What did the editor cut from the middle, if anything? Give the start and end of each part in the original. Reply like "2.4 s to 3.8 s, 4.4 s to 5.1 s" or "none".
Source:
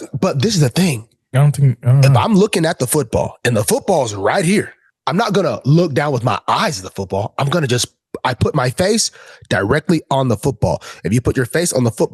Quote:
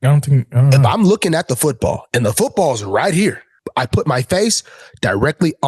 4.8 s to 8.0 s